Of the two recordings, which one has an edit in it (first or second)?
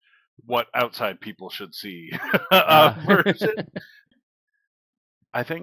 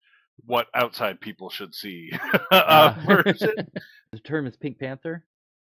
second